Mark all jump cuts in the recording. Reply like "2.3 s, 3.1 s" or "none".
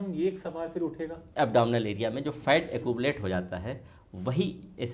1.2 s